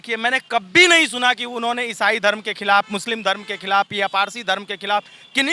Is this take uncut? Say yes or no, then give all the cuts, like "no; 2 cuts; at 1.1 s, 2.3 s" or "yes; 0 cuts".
yes; 0 cuts